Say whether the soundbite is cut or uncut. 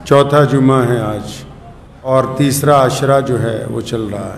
cut